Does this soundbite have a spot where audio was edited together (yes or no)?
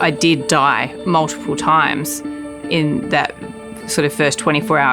yes